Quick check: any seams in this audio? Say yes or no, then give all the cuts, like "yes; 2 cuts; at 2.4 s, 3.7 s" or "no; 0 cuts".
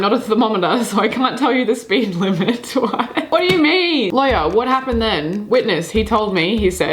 yes; 2 cuts; at 3.3 s, 4.1 s